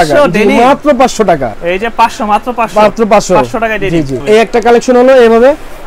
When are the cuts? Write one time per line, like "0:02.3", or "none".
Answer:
0:01.5
0:04.2

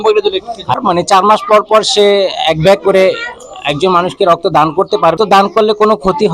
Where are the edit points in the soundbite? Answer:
0:00.8
0:05.2

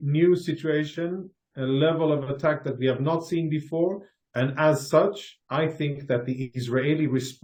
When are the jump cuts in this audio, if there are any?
none

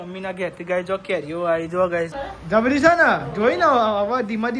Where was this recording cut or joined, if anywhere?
0:02.2

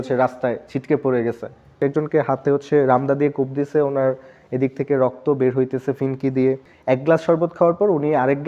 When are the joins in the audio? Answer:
0:01.8
0:06.7

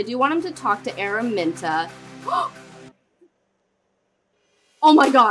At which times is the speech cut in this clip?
none

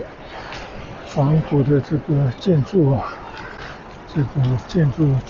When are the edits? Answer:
none

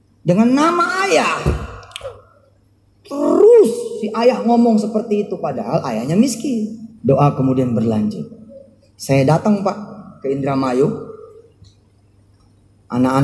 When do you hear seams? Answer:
0:06.9

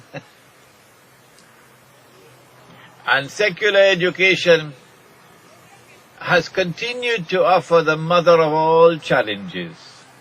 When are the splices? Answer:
none

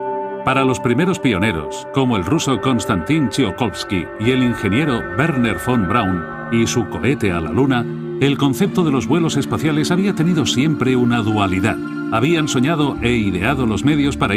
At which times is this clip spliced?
0:12.0

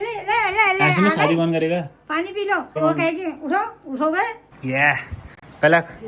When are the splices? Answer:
0:02.8
0:04.5

